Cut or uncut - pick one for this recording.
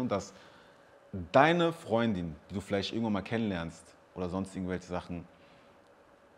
uncut